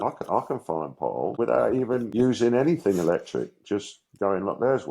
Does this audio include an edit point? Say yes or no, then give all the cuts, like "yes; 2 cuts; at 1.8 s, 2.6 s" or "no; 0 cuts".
yes; 2 cuts; at 1.3 s, 2.1 s